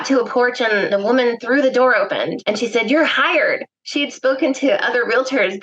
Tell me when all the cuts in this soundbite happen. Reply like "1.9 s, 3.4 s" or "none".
0.9 s, 2.4 s